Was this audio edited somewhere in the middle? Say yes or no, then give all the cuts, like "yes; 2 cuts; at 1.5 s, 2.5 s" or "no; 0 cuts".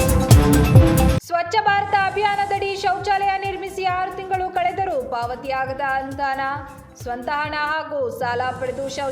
yes; 1 cut; at 1.1 s